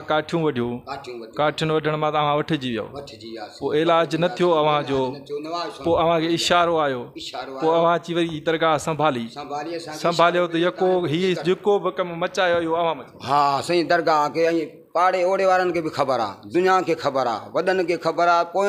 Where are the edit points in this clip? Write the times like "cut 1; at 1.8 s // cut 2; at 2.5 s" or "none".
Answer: none